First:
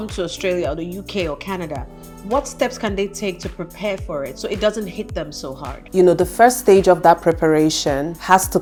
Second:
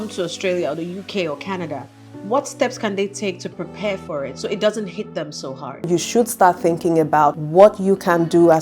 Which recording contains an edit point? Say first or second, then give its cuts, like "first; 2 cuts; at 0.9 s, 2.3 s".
second; 1 cut; at 5.9 s